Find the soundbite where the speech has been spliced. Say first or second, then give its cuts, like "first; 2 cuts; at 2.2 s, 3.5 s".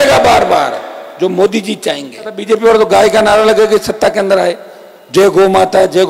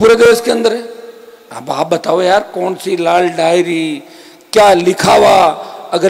first; 1 cut; at 2.4 s